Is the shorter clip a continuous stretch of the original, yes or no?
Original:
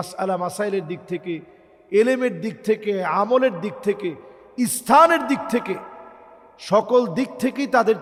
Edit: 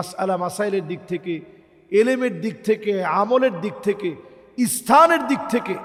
yes